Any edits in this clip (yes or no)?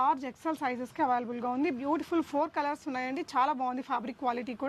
no